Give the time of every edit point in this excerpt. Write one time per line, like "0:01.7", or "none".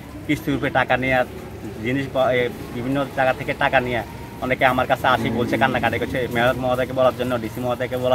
none